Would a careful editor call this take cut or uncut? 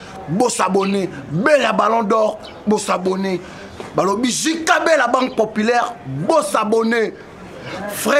uncut